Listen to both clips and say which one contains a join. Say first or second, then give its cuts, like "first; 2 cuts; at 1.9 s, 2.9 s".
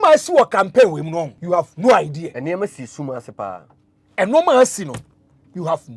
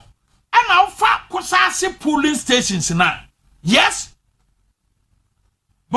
first; 2 cuts; at 1.4 s, 2.3 s